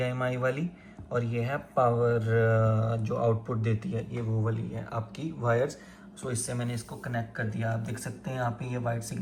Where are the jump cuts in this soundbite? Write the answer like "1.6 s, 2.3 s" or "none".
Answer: none